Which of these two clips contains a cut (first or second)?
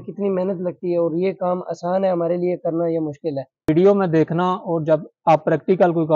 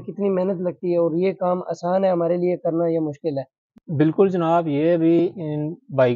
first